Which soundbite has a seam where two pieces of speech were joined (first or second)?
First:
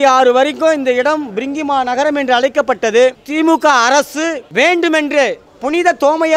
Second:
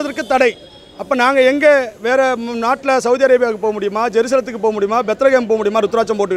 first